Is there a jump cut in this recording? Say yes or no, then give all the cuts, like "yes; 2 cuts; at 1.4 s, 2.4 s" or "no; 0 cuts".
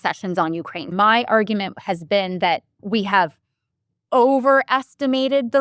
yes; 2 cuts; at 0.9 s, 2.8 s